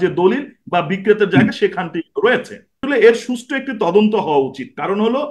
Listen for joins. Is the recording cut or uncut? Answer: cut